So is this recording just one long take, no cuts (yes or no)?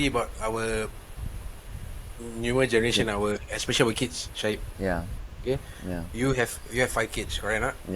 yes